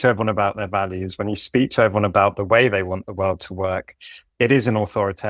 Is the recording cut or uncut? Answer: cut